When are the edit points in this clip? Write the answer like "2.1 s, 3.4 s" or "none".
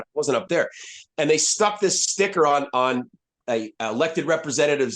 3.4 s